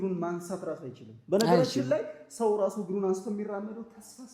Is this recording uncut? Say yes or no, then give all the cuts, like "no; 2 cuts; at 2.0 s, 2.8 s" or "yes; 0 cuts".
yes; 0 cuts